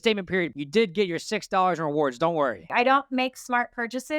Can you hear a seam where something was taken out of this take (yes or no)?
yes